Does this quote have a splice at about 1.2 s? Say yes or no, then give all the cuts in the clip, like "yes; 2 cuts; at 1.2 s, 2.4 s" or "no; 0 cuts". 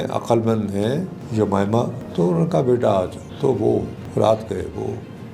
yes; 3 cuts; at 1.2 s, 2.0 s, 4.0 s